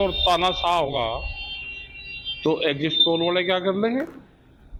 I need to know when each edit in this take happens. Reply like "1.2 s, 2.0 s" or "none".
1.0 s